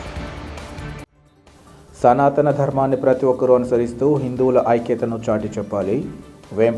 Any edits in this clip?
no; 0 cuts

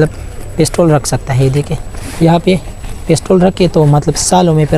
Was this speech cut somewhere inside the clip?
no; 0 cuts

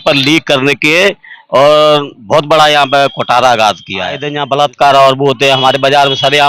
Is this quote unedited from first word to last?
no; 1 cut; at 4.3 s

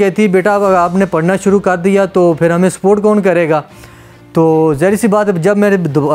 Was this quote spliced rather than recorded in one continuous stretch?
no; 0 cuts

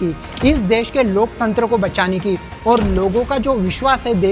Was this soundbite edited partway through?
no; 0 cuts

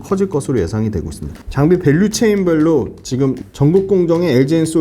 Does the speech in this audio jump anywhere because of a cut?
yes; 1 cut; at 1.4 s

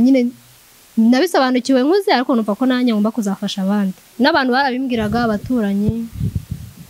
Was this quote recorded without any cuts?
no; 1 cut; at 4.0 s

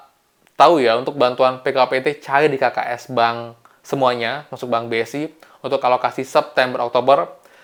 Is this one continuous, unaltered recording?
yes; 0 cuts

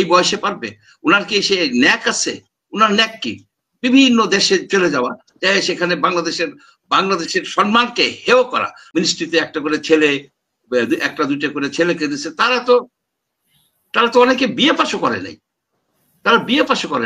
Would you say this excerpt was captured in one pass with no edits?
no; 1 cut; at 9.0 s

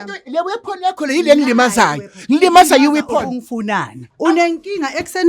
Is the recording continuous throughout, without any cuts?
no; 1 cut; at 4.0 s

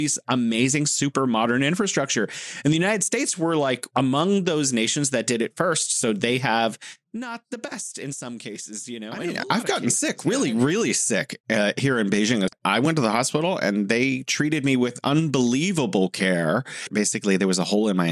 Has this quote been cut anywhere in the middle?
yes; 3 cuts; at 9.3 s, 12.5 s, 16.9 s

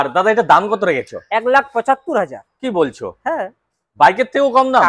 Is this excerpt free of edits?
yes; 0 cuts

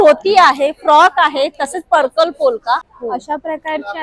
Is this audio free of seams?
no; 1 cut; at 2.9 s

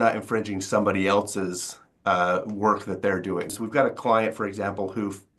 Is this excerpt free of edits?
no; 1 cut; at 3.6 s

